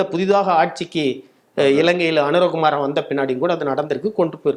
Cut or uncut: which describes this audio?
uncut